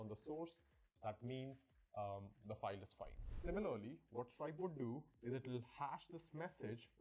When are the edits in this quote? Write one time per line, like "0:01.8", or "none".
0:02.1